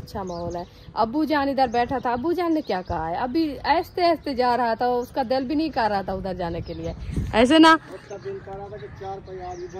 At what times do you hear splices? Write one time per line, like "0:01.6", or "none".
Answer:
none